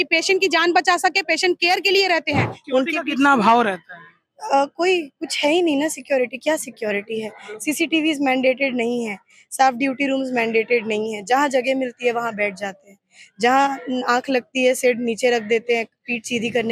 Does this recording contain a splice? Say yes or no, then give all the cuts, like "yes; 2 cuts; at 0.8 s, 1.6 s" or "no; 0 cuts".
yes; 1 cut; at 2.5 s